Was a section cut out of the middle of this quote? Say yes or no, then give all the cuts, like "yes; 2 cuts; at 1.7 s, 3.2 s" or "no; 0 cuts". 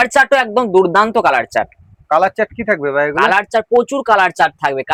no; 0 cuts